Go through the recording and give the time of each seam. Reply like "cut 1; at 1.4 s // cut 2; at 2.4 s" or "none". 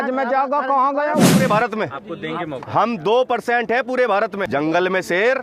cut 1; at 1.3 s // cut 2; at 4.4 s